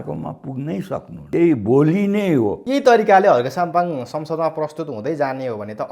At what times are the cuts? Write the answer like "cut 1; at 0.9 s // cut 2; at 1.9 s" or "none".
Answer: cut 1; at 1.2 s // cut 2; at 2.6 s